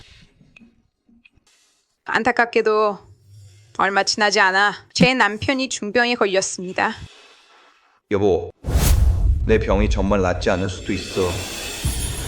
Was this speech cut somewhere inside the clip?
yes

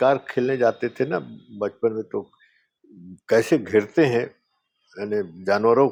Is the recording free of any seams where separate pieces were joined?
yes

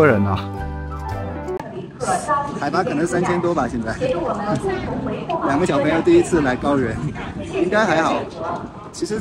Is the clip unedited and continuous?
no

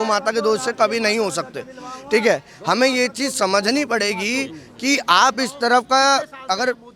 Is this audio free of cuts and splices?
yes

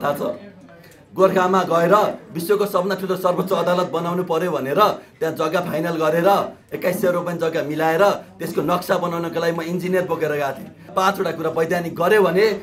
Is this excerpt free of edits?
no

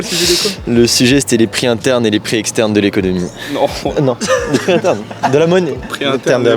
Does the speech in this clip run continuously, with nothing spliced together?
yes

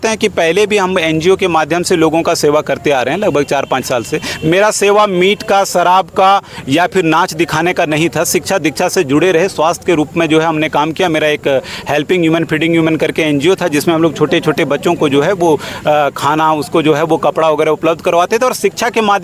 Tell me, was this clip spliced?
no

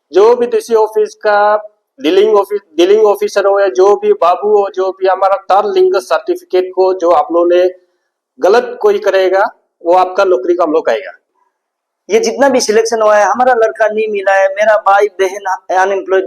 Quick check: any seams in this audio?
yes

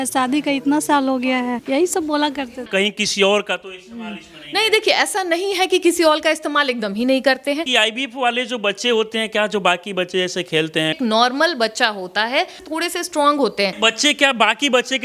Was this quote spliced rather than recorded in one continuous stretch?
yes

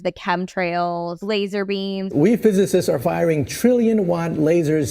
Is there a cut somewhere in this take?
yes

